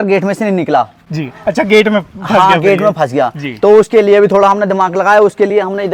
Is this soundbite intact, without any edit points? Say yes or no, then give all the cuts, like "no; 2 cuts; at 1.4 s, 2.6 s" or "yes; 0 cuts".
yes; 0 cuts